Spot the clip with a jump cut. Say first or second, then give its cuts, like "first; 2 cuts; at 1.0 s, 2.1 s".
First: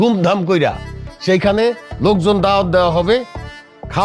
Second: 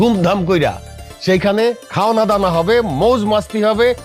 second; 1 cut; at 1.9 s